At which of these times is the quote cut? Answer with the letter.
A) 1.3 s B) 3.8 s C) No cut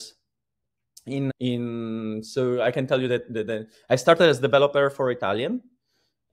A